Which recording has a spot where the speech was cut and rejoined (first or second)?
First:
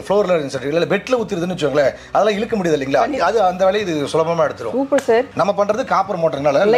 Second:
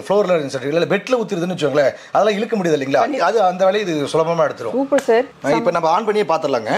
first